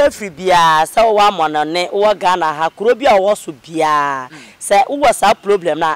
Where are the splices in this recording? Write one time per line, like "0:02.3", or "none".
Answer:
none